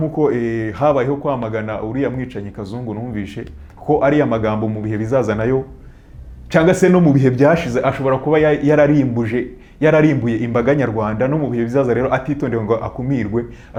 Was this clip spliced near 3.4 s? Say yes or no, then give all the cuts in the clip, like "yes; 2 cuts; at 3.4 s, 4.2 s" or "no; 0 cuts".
no; 0 cuts